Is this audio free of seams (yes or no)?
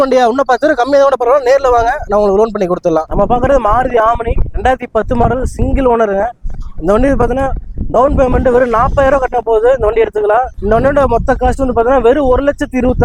yes